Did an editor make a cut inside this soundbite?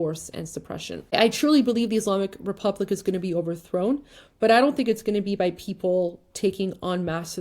yes; 1 cut; at 1.1 s

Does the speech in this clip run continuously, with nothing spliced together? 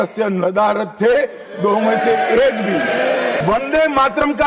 no; 1 cut; at 3.4 s

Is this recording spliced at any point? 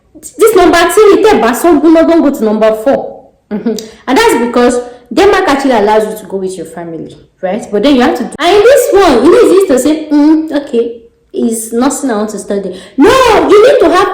yes; 1 cut; at 8.3 s

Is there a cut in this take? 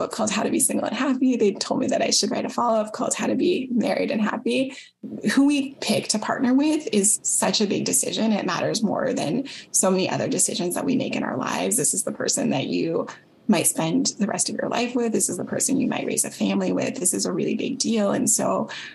no; 0 cuts

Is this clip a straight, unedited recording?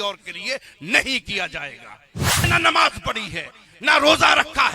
no; 1 cut; at 2.5 s

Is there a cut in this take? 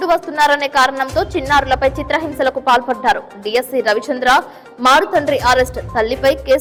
no; 0 cuts

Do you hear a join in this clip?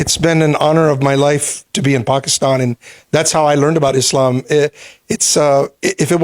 no; 0 cuts

